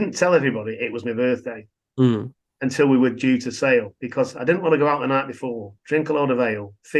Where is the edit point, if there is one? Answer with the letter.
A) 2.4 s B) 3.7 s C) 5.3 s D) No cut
D